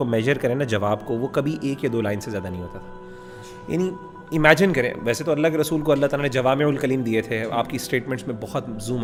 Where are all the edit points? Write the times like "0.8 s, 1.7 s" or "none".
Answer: none